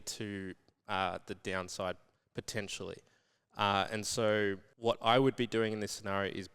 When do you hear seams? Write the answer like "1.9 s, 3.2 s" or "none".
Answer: 4.7 s